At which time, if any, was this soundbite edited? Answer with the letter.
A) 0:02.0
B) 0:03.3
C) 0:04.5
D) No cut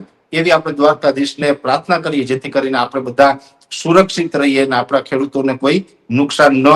D